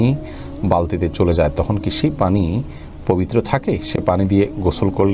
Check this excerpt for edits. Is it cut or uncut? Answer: uncut